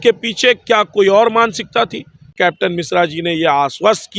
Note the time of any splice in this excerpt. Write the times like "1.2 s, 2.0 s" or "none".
2.3 s

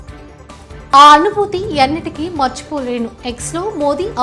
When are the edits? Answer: 0.9 s

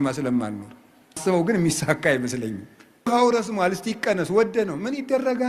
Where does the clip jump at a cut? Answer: 1.2 s, 3.1 s

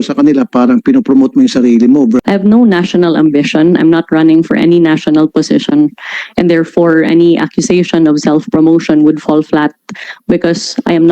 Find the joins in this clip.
2.2 s

